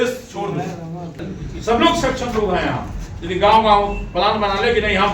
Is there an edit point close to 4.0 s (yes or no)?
no